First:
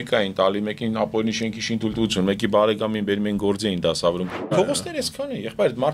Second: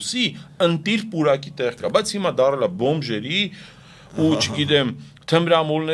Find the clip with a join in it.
first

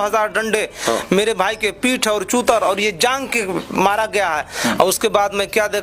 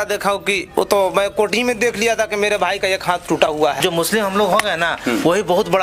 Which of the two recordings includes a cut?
second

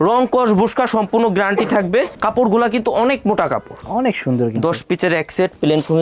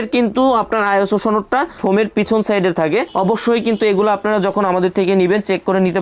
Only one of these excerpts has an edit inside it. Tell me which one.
first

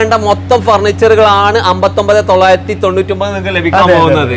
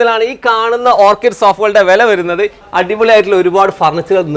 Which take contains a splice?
second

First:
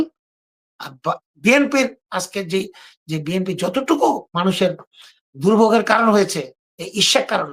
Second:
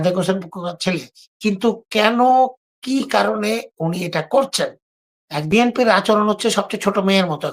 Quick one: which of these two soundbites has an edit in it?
second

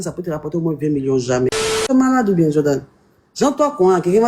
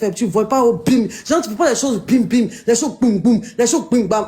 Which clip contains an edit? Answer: first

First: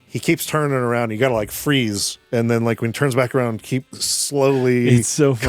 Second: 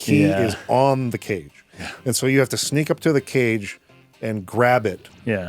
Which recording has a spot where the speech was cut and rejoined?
first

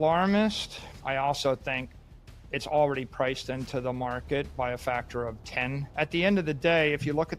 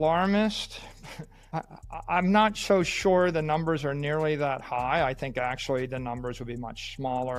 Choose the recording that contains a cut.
first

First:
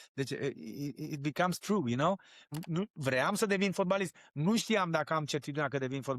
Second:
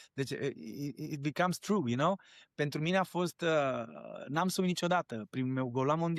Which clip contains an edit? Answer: first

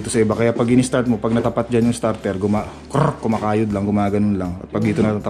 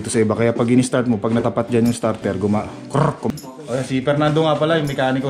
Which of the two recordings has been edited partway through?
second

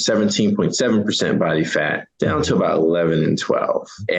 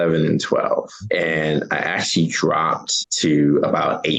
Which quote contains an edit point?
first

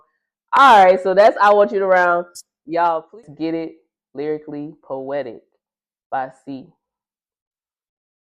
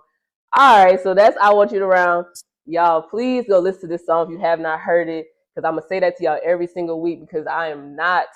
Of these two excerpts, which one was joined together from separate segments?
first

